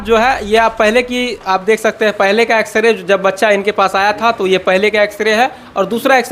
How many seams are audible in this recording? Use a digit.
0